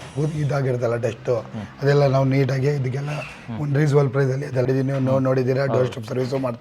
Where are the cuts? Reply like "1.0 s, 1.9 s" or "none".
4.7 s

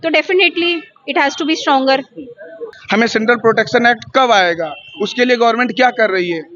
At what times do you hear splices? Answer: 2.7 s

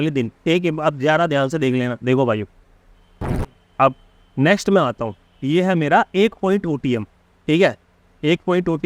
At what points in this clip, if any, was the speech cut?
none

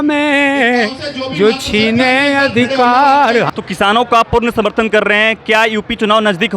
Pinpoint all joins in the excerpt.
3.5 s

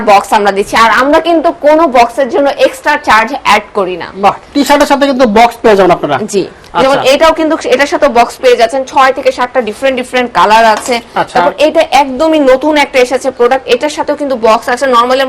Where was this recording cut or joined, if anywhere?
none

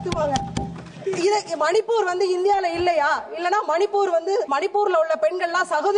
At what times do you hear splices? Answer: 4.5 s

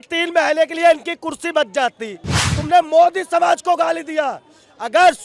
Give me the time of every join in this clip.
2.5 s

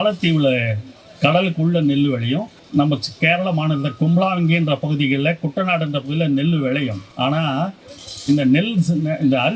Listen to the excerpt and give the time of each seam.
2.6 s, 7.0 s

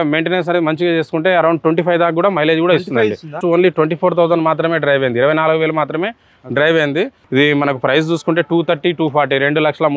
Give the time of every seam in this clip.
3.4 s, 7.2 s

